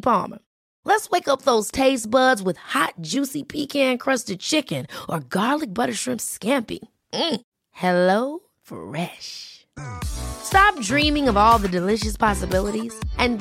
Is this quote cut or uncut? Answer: uncut